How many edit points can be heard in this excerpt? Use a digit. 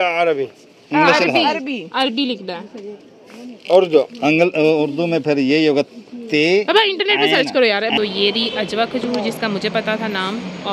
1